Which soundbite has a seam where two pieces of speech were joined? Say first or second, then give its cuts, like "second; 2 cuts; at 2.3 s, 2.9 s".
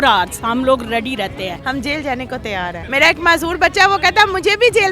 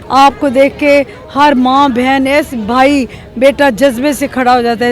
first; 2 cuts; at 1.5 s, 2.8 s